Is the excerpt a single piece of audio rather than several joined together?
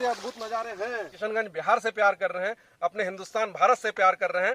no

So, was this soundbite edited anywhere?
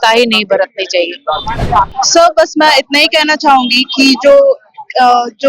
yes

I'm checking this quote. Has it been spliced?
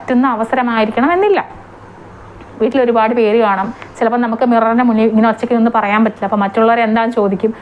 no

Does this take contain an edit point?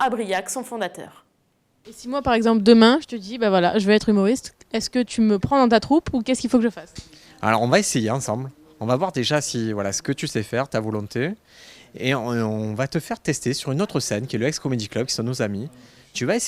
yes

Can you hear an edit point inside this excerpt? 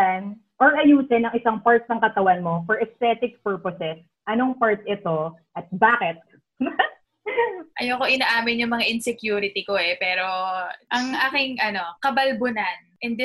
yes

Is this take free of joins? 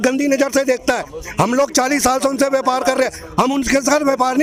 yes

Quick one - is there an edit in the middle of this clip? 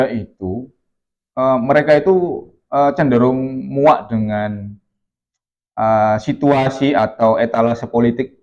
no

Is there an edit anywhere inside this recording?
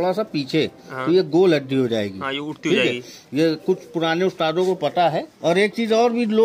yes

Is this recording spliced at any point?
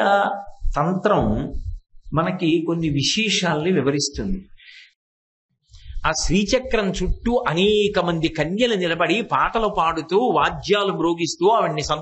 yes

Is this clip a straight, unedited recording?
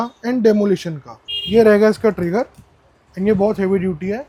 yes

